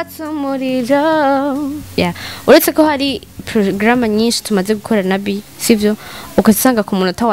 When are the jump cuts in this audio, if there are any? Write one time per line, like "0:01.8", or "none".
0:01.8